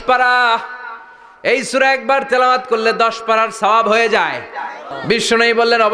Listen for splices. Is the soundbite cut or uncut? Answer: cut